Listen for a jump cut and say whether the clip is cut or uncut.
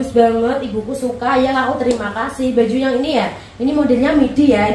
uncut